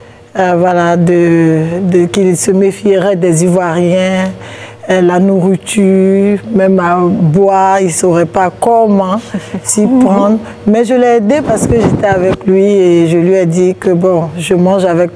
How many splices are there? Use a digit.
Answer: 0